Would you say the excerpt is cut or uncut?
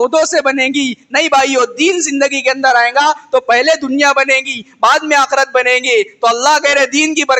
uncut